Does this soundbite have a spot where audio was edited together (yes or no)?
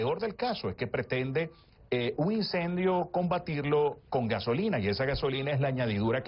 no